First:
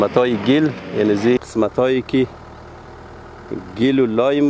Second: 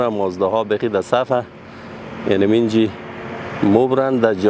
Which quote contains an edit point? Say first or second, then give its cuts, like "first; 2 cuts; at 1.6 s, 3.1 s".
first; 1 cut; at 1.4 s